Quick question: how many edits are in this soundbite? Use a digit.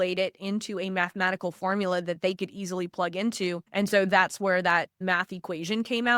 2